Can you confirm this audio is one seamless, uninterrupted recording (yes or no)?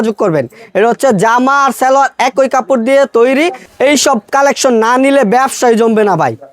no